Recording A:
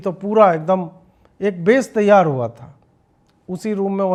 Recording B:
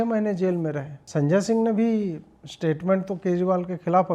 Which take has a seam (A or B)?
B